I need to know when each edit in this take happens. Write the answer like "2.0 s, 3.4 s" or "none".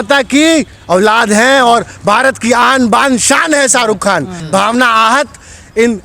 4.3 s